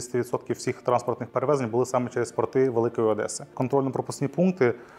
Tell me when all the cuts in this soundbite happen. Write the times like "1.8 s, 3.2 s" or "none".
1.2 s, 3.5 s